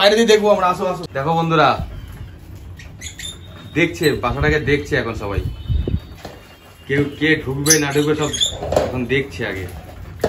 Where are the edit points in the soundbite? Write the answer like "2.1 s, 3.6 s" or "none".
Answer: 1.1 s

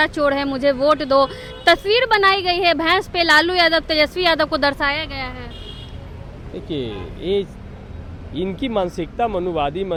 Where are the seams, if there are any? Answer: none

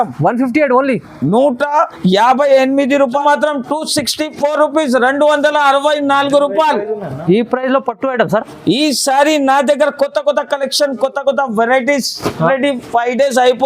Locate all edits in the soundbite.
3.2 s, 12.5 s

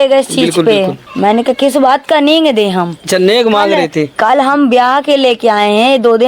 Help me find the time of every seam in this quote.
1.0 s

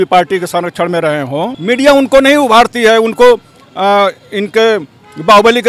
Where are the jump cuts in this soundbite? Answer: 1.6 s

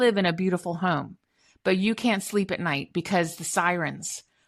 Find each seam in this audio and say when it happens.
none

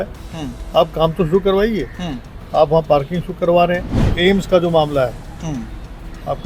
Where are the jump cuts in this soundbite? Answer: 4.0 s

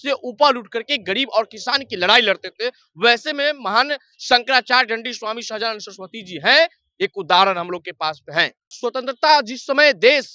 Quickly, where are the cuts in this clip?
8.8 s

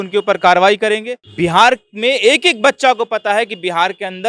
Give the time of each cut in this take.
1.2 s

